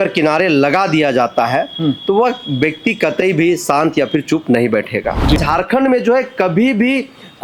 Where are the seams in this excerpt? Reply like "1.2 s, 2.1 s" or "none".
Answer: 5.4 s